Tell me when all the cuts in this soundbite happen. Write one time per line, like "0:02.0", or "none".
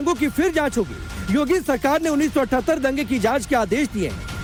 none